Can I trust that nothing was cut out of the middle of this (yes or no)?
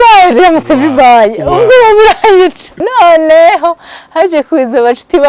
no